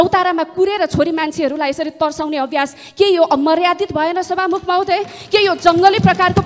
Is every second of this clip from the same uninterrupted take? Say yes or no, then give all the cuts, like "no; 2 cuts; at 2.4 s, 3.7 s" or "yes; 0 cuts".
yes; 0 cuts